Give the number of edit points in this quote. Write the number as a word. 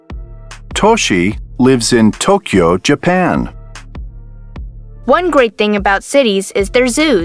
two